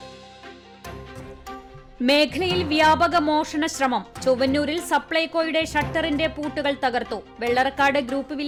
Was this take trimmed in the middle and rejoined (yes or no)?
no